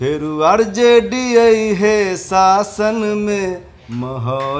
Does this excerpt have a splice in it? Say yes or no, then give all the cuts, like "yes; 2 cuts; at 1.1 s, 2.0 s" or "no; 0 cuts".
no; 0 cuts